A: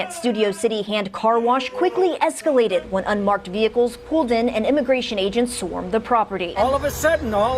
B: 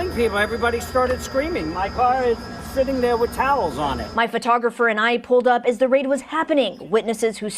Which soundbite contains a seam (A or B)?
A